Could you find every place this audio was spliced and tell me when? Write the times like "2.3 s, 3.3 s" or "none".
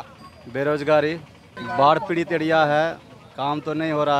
1.5 s